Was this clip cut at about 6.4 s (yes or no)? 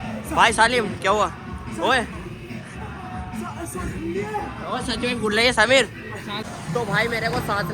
yes